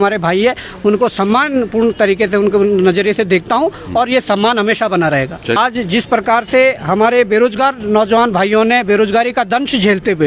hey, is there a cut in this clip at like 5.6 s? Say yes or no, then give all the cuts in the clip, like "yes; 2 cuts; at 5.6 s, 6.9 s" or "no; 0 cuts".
yes; 1 cut; at 5.6 s